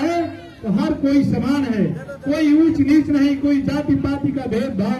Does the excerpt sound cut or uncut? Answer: uncut